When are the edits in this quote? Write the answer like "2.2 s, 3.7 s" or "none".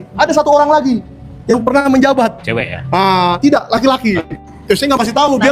4.5 s